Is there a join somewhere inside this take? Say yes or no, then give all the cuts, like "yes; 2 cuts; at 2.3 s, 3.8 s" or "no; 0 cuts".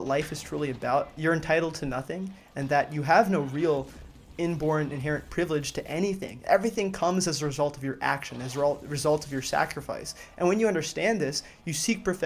yes; 1 cut; at 1.1 s